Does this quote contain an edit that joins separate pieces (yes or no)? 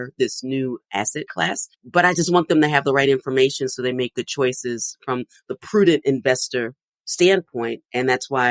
no